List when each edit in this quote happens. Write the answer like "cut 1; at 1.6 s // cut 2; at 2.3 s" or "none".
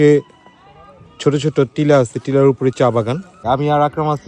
cut 1; at 3.3 s